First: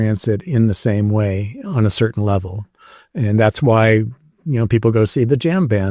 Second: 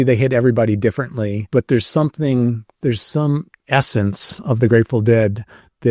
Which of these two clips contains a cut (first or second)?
second